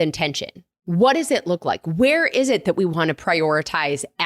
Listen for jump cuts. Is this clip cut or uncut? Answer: uncut